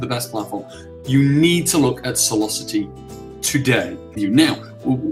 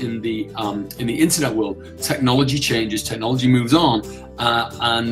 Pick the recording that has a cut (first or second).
first